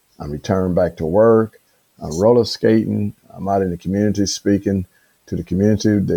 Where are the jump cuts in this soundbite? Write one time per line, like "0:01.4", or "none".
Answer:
none